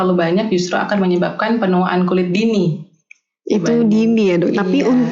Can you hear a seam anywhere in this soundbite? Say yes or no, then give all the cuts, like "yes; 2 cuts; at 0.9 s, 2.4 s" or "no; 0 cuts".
no; 0 cuts